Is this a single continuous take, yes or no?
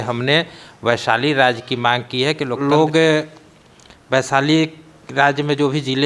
no